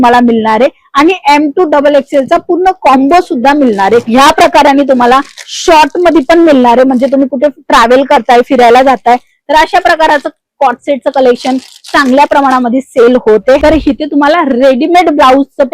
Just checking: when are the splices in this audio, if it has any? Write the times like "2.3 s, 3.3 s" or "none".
4.1 s, 13.6 s